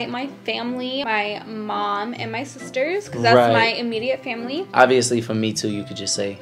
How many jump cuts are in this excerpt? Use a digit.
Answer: 1